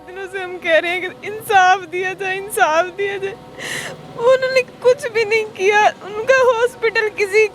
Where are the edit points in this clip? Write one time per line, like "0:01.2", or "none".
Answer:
none